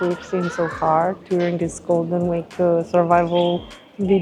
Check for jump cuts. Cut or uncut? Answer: uncut